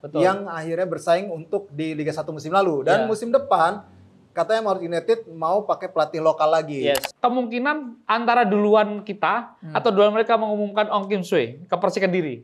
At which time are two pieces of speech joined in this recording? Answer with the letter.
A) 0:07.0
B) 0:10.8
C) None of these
A